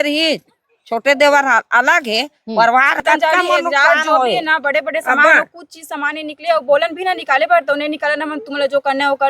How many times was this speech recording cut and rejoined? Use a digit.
1